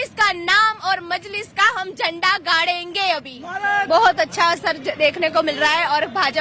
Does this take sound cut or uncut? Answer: cut